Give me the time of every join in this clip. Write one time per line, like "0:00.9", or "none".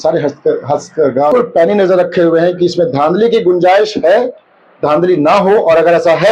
0:01.3